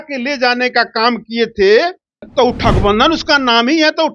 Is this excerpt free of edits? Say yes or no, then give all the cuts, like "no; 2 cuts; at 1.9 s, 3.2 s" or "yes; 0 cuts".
no; 1 cut; at 2.2 s